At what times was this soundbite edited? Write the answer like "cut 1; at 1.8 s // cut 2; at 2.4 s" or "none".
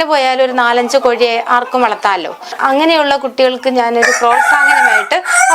cut 1; at 2.6 s